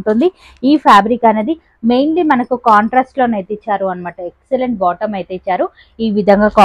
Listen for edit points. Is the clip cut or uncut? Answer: uncut